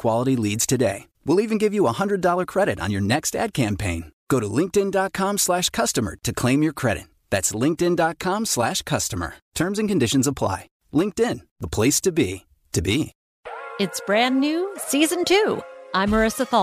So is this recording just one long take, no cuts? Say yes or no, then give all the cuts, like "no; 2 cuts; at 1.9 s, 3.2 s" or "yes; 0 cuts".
no; 1 cut; at 13.2 s